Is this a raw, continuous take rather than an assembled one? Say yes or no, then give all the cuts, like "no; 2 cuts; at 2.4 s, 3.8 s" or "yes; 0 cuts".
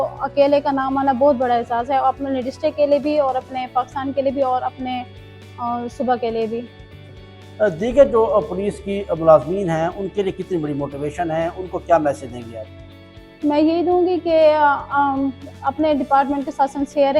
yes; 0 cuts